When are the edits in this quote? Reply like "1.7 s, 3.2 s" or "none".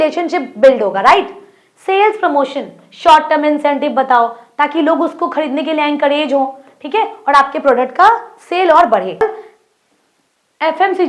9.2 s